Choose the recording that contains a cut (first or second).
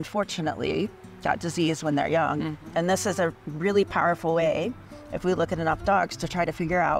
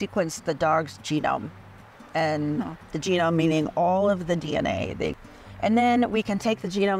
second